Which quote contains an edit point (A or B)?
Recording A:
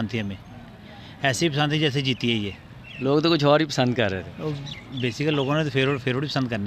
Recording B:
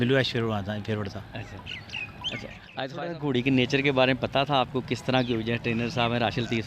B